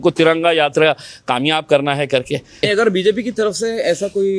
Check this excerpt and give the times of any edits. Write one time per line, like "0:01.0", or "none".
0:02.6